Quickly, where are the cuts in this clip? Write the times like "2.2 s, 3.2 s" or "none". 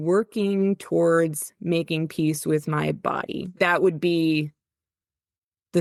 none